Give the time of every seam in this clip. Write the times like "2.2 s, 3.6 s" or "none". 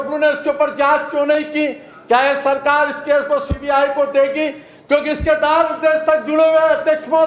none